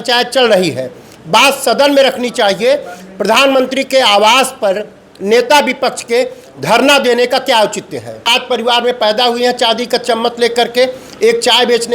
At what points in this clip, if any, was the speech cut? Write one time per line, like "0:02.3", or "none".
0:08.3